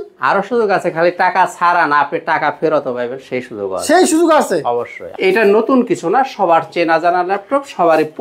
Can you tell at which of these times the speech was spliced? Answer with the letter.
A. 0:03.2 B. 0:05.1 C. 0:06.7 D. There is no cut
B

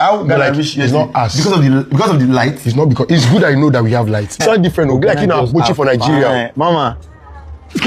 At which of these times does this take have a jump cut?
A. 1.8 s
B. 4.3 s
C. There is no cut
B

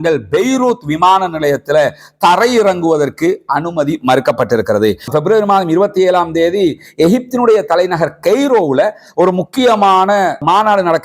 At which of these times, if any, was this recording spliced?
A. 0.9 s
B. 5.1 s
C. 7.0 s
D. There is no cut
B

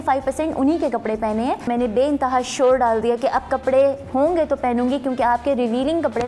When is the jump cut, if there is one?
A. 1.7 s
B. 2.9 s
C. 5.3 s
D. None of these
A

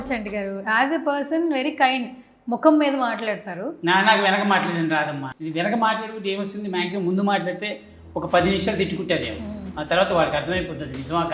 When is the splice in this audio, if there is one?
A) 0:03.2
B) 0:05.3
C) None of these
B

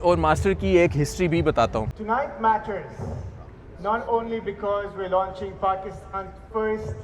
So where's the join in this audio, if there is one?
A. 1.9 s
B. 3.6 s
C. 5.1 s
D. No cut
A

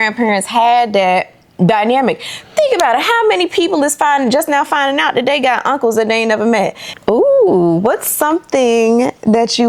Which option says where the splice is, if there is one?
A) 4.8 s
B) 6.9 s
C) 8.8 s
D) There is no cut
B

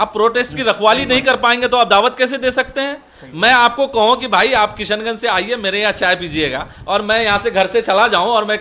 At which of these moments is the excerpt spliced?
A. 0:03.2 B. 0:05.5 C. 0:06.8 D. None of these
D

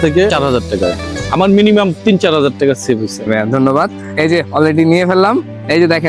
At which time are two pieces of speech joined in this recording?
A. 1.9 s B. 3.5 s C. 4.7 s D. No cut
D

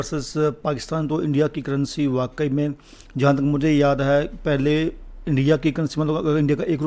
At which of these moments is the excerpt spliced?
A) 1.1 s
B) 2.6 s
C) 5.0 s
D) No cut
D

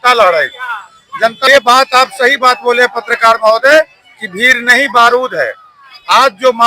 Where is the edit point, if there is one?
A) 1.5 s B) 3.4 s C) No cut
A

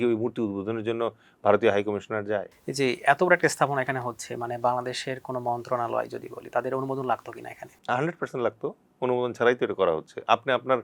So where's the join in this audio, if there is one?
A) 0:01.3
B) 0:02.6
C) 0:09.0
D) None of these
B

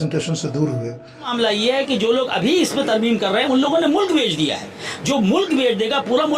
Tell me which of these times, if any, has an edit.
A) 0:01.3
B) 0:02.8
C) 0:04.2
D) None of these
A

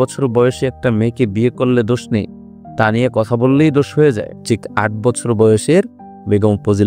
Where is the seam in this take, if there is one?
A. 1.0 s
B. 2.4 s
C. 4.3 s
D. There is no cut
C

